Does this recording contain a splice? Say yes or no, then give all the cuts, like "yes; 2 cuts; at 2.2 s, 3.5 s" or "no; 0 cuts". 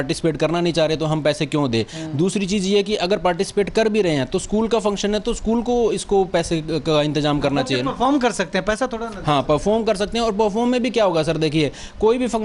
no; 0 cuts